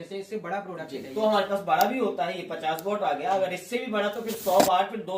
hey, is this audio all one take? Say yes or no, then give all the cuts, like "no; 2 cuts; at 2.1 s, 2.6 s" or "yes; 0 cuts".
yes; 0 cuts